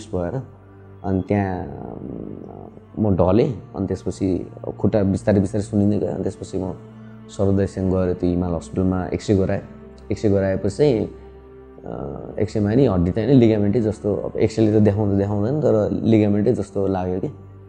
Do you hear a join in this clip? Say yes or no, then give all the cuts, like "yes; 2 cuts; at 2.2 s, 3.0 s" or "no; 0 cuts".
no; 0 cuts